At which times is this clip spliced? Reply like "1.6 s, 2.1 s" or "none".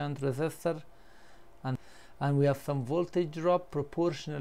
1.8 s